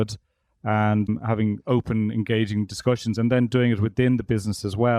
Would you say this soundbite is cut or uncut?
cut